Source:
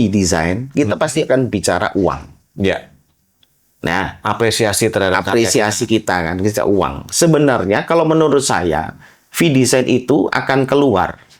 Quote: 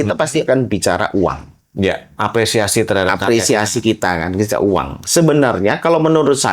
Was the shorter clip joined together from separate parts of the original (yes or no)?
yes